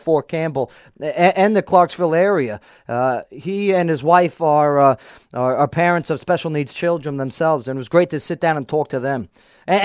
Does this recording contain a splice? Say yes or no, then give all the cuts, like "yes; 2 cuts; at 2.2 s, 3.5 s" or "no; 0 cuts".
no; 0 cuts